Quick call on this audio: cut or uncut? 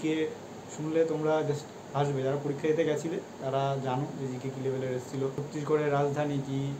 cut